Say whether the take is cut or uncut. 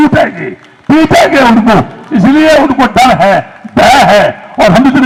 uncut